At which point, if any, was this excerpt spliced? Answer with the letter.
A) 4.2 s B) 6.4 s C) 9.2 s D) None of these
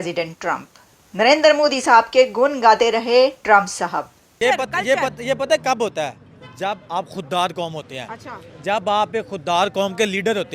A